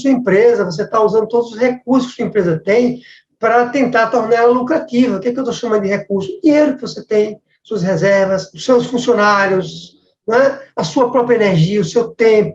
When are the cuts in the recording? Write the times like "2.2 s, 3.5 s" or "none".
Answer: 8.5 s